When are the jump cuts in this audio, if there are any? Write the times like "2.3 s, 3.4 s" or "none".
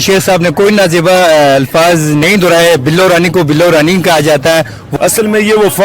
4.8 s